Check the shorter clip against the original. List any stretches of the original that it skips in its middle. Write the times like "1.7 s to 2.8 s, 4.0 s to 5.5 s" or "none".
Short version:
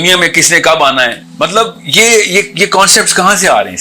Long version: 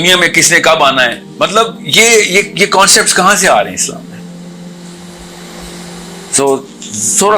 none